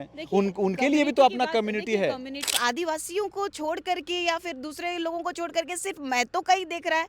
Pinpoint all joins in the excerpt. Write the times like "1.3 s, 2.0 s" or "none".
2.5 s